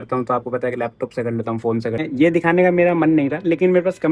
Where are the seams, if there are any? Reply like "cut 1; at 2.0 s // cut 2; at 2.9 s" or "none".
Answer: cut 1; at 2.0 s